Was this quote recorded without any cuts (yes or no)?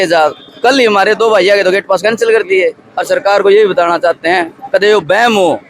no